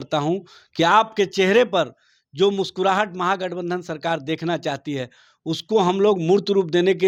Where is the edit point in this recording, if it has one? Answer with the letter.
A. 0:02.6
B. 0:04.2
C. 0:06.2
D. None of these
D